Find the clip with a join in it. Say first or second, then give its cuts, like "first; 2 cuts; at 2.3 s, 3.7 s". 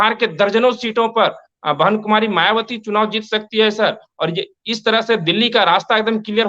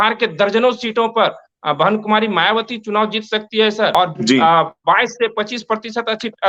second; 1 cut; at 3.9 s